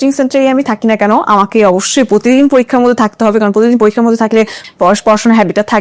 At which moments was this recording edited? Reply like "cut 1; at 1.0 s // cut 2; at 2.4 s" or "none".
cut 1; at 4.6 s